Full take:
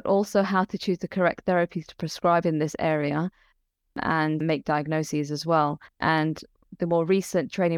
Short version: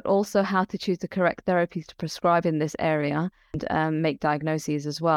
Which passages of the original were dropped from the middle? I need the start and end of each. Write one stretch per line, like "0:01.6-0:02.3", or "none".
0:03.9-0:04.4